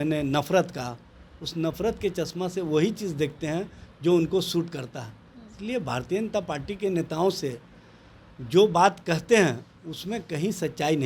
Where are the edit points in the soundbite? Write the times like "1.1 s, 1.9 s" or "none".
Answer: none